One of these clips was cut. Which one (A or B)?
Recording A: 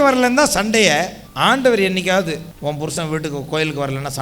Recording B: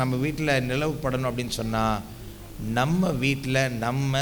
A